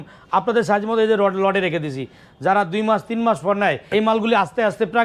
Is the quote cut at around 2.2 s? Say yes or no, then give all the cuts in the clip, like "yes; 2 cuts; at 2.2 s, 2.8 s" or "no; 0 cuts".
no; 1 cut; at 3.8 s